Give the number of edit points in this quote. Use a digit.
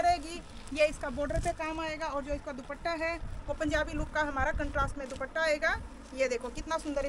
0